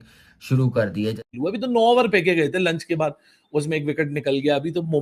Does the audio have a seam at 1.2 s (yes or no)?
yes